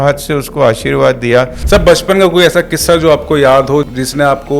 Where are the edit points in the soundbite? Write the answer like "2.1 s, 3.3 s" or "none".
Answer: 1.6 s, 3.9 s